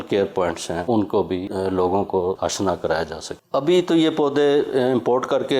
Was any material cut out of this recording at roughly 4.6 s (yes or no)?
no